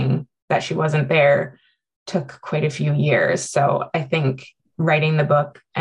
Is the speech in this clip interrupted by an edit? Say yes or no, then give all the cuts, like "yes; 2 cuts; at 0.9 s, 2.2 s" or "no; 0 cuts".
no; 0 cuts